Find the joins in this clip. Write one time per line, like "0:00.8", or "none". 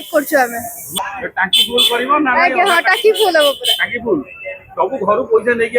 0:01.0